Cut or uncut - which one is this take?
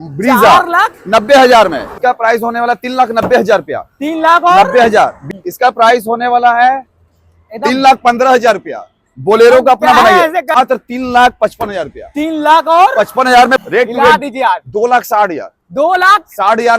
cut